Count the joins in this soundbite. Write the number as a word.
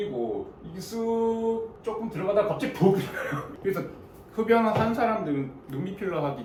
zero